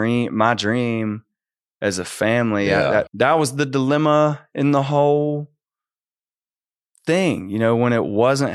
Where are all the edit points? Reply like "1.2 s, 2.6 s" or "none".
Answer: 3.1 s